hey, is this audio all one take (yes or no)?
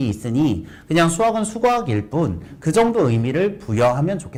yes